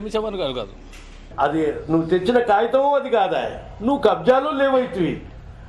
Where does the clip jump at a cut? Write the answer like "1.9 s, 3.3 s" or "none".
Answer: 1.3 s

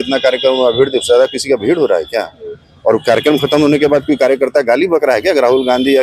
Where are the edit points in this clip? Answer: none

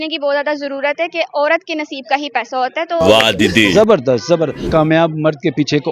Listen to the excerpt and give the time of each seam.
4.7 s

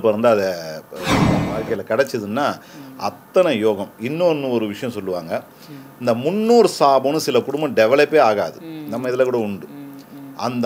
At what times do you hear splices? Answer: 1.4 s

